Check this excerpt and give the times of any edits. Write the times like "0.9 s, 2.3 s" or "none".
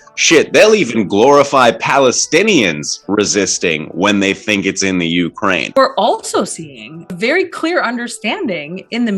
5.8 s, 7.1 s

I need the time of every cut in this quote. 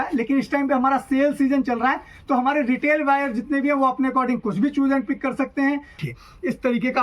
none

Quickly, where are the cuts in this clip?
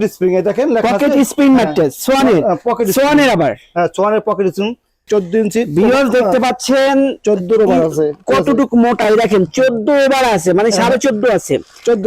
5.0 s

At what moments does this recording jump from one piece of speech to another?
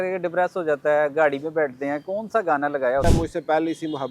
3.0 s

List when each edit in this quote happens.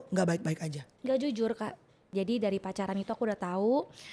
2.1 s

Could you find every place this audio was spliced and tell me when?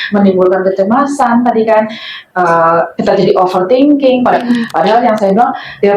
4.3 s

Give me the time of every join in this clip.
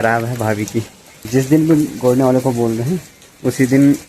1.3 s

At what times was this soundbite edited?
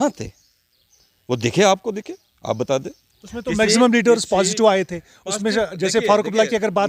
none

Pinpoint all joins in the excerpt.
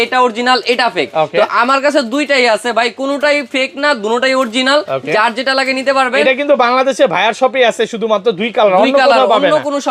none

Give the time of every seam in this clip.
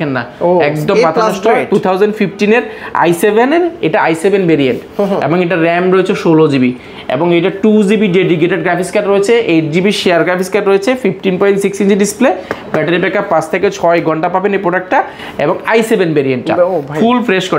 none

